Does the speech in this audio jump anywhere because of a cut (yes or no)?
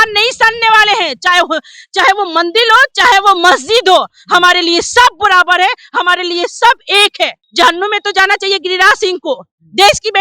yes